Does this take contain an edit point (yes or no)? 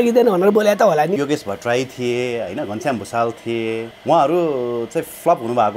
yes